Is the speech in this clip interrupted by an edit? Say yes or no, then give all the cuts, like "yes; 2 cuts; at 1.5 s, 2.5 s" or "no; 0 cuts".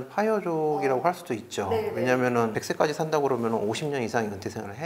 yes; 1 cut; at 2.6 s